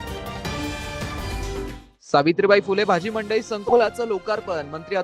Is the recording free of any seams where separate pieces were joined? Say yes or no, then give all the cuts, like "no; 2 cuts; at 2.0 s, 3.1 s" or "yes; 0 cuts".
yes; 0 cuts